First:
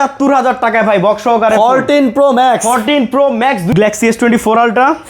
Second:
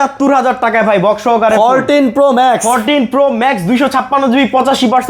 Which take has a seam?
first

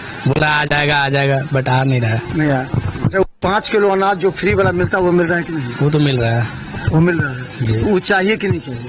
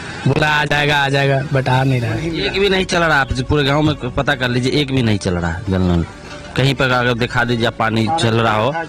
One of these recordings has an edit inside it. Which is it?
second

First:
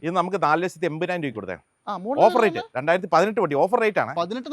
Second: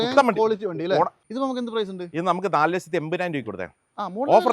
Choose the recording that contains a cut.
second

